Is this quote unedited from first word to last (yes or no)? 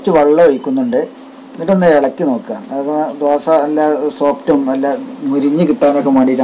yes